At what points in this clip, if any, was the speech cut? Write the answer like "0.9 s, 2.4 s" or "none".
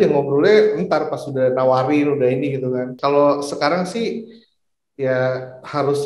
2.9 s

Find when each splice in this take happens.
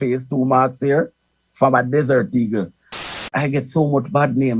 3.0 s

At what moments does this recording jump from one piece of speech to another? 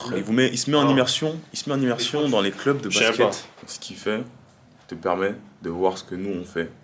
3.5 s

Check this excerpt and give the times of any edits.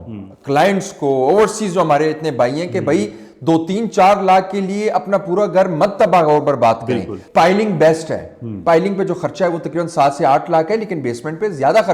7.2 s

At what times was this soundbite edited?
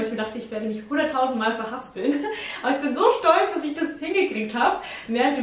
none

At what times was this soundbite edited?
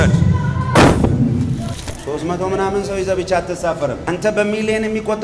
1.6 s, 4.0 s

